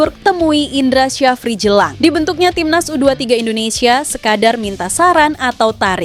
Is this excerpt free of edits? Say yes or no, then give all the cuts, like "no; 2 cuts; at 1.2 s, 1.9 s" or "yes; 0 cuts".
yes; 0 cuts